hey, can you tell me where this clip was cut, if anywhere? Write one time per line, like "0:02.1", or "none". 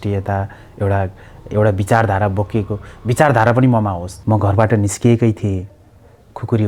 0:04.1